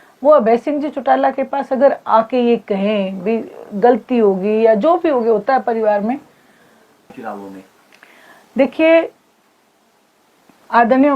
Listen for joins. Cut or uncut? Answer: cut